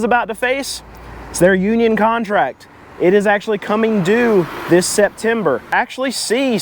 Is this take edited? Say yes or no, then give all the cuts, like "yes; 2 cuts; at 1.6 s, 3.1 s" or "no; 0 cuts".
yes; 1 cut; at 5.7 s